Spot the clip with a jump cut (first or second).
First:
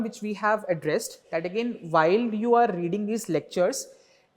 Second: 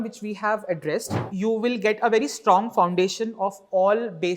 second